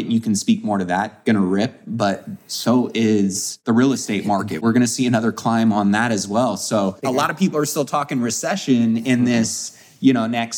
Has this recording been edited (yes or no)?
yes